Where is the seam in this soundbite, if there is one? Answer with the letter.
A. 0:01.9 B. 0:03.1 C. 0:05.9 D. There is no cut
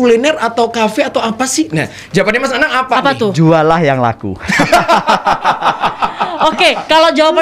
D